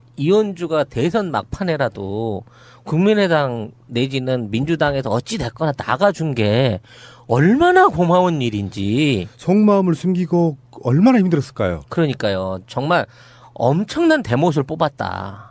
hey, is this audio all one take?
yes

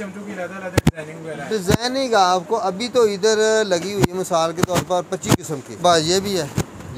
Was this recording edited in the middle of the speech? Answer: yes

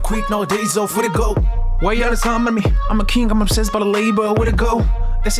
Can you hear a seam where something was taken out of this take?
no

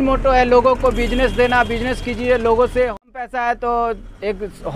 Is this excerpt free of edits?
yes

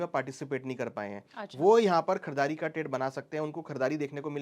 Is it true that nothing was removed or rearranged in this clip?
yes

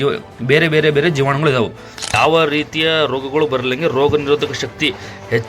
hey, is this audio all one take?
no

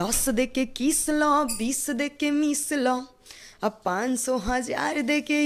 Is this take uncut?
yes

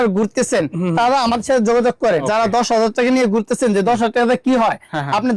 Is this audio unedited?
no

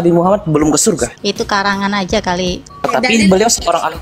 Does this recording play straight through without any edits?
no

